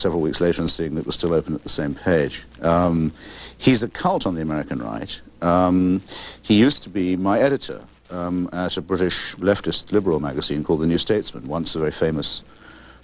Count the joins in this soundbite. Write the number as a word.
one